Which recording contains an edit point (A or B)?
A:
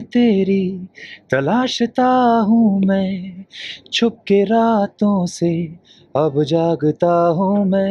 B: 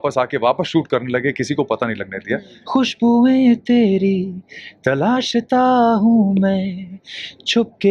B